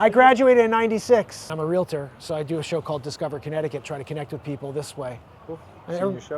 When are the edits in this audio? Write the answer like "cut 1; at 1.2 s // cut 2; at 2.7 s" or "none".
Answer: cut 1; at 1.4 s